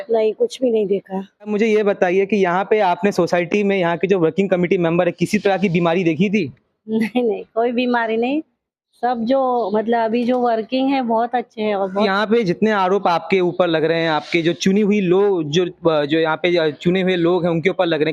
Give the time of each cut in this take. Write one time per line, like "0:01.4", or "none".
0:01.5
0:12.0